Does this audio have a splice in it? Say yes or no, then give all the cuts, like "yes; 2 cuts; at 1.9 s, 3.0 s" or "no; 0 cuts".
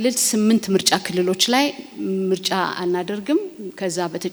no; 0 cuts